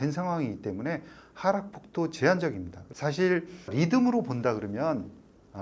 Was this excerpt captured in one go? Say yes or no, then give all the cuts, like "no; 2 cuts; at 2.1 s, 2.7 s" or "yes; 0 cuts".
no; 2 cuts; at 2.8 s, 3.7 s